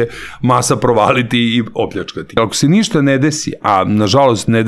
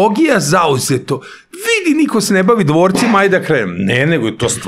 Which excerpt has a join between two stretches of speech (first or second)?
first